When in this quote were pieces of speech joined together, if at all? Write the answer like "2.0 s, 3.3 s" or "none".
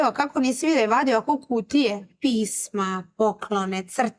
2.1 s